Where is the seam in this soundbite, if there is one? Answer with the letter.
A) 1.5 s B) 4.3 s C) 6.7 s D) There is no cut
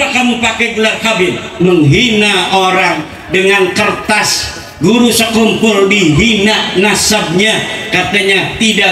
A